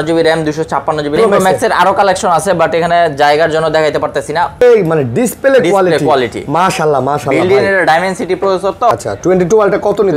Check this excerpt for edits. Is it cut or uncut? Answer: cut